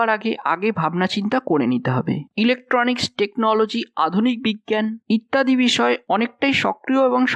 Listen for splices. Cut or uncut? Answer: cut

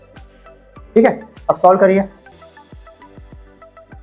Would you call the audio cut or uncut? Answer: cut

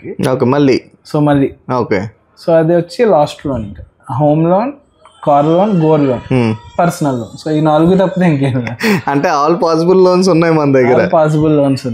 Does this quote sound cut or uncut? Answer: uncut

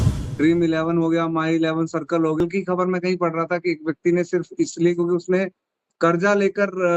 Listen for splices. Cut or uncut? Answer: cut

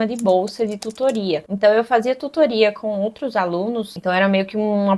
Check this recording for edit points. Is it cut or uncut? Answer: uncut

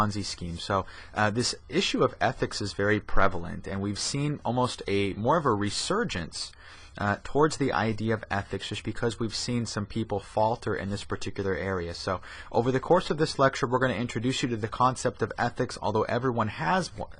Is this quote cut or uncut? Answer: cut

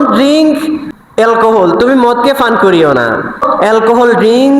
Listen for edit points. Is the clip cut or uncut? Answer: cut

